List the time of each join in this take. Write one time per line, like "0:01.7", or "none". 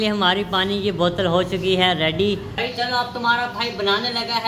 0:02.5